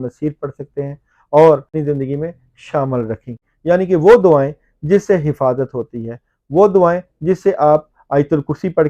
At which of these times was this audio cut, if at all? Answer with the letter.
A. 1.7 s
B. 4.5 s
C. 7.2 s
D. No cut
A